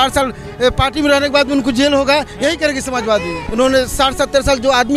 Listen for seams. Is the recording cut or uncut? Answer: cut